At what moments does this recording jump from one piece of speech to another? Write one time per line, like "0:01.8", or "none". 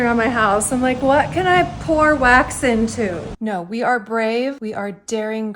0:03.2

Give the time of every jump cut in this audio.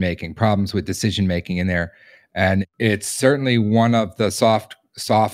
0:02.7

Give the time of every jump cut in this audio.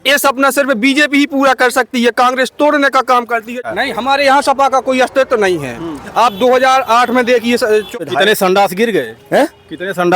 0:03.6
0:07.9

